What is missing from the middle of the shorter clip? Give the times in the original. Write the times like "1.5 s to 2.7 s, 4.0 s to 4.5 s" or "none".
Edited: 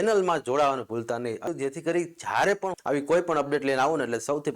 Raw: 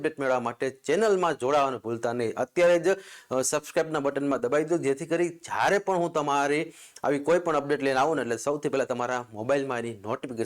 2.4 s to 4.7 s, 5.9 s to 6.9 s

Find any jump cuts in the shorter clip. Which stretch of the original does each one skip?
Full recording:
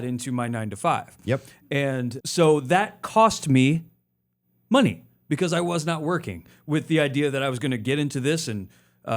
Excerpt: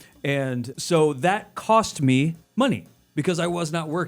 3.9 s to 4.6 s

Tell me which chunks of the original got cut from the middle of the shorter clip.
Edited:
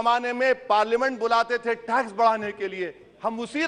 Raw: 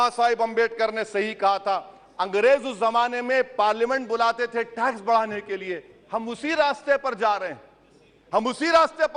none

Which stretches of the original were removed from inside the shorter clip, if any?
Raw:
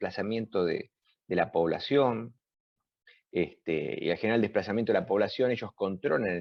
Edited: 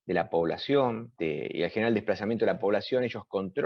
2.3 s to 3.6 s

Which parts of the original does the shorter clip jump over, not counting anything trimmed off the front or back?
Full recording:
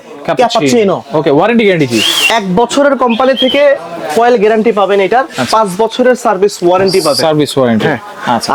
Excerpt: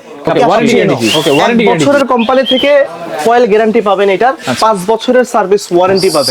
1.9 s to 2.8 s

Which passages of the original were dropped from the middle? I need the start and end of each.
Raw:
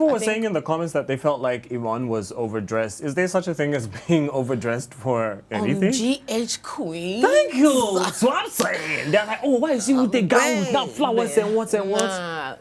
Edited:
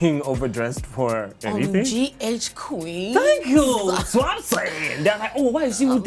none

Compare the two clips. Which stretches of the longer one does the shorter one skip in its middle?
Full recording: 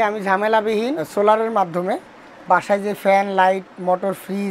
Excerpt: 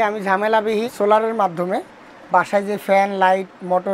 0.9 s to 1.1 s

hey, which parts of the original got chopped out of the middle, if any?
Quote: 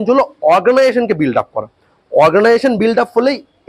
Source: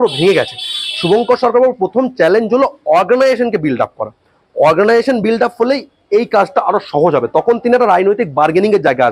none

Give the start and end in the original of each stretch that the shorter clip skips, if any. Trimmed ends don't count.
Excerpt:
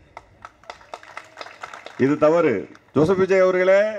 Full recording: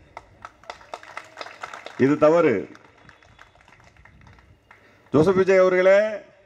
2.8 s to 4.9 s

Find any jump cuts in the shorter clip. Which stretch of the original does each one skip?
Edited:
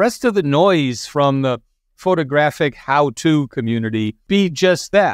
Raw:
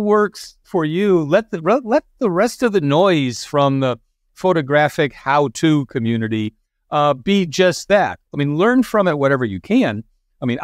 6.6 s to 7.2 s

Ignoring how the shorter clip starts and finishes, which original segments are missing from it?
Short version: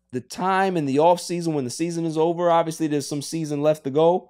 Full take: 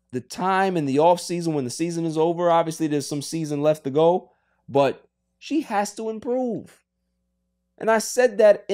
none

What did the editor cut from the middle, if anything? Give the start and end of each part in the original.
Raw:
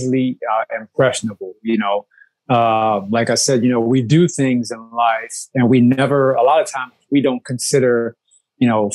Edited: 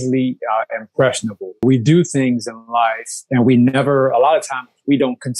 1.6 s to 3.8 s

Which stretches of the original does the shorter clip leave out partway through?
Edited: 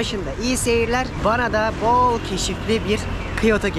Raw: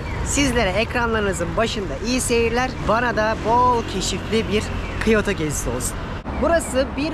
none

